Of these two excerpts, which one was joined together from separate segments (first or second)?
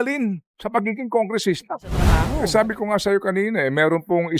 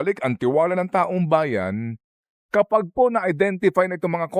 first